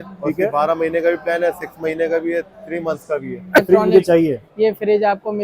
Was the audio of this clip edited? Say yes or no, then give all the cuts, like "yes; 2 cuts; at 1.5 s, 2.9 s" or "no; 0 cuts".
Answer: yes; 1 cut; at 3.6 s